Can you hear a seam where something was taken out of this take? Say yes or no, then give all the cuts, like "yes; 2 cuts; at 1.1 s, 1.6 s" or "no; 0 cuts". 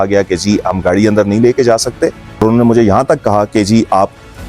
yes; 1 cut; at 2.4 s